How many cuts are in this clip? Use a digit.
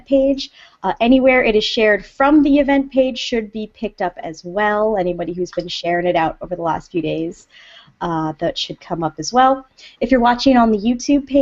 1